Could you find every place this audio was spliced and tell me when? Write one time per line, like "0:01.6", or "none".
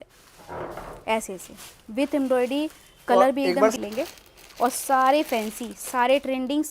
0:03.8